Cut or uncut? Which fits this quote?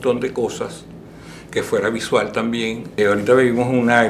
cut